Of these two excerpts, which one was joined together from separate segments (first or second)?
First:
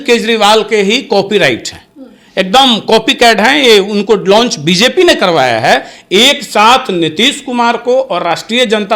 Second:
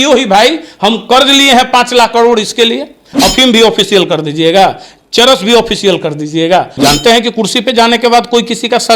second